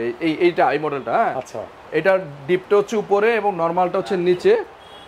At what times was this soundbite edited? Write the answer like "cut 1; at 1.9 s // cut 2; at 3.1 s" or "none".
none